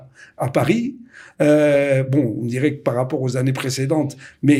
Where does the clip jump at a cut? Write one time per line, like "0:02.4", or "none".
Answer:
none